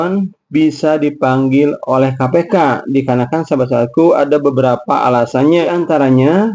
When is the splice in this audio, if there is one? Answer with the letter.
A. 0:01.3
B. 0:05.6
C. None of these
B